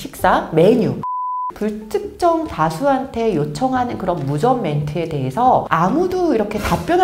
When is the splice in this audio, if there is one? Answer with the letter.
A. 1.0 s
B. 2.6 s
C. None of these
A